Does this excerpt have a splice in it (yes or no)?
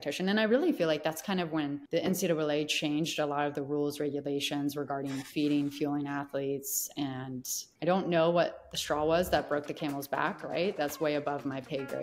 yes